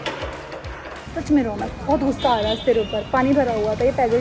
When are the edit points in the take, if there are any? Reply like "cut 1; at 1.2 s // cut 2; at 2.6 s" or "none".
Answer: cut 1; at 1.0 s